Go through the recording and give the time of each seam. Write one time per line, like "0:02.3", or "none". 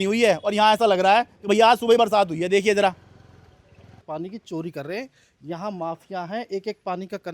0:04.0